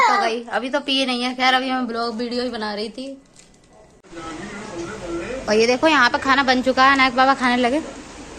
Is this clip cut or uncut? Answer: cut